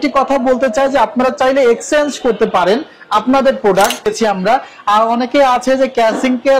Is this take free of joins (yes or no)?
no